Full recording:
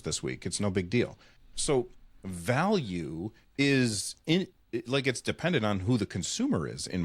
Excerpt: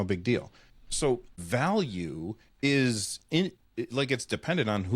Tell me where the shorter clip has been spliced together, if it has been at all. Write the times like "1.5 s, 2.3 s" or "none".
1.3 s